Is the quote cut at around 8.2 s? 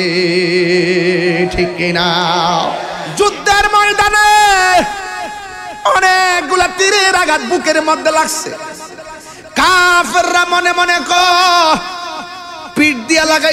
no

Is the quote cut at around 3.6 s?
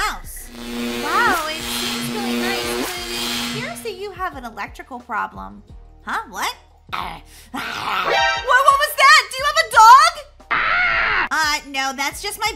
no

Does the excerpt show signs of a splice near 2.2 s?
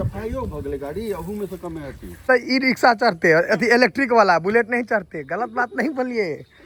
no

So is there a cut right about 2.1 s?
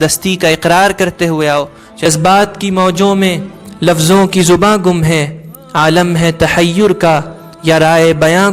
yes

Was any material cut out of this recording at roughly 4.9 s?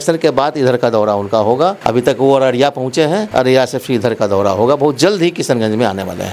no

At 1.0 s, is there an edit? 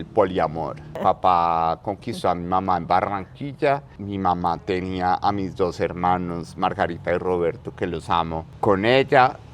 yes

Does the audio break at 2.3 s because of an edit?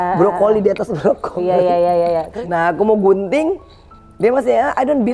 yes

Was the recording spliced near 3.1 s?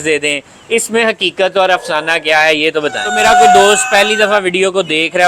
yes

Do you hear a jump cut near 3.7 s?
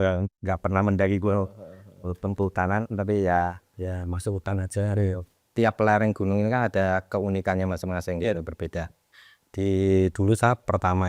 no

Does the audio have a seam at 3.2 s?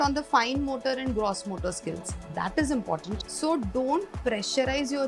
yes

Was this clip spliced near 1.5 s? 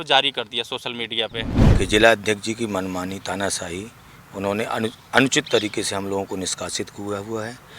yes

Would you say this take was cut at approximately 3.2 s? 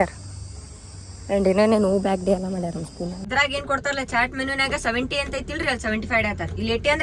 yes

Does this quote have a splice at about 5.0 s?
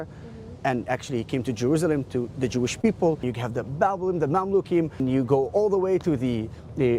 yes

